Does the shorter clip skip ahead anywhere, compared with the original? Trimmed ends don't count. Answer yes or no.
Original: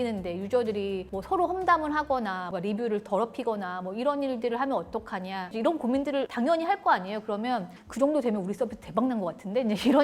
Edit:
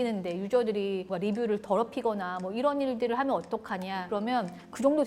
yes